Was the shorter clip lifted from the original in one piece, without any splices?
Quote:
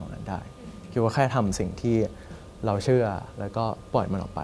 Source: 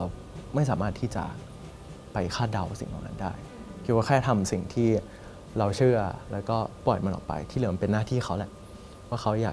yes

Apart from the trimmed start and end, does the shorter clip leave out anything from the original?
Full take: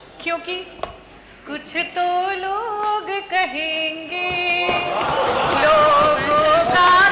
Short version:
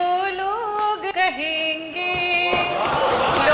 yes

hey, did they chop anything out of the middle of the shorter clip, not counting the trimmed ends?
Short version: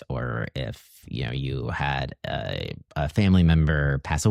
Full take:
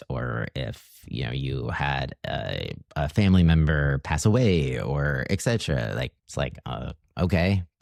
no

